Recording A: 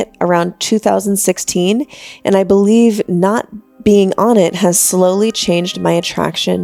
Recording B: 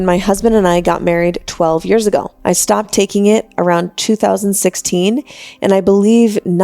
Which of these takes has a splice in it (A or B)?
B